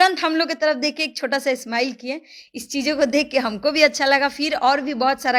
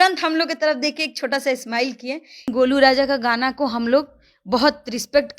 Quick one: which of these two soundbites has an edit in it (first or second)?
second